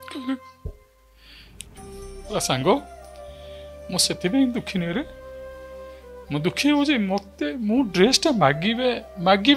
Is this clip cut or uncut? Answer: cut